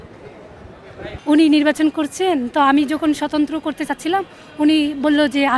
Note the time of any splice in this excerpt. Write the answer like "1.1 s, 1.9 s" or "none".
1.1 s